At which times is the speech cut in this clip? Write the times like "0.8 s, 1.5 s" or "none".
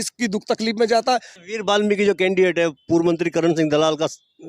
1.3 s